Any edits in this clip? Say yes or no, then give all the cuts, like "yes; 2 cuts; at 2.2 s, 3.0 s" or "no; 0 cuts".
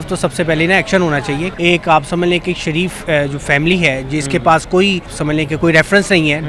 yes; 2 cuts; at 1.5 s, 5.2 s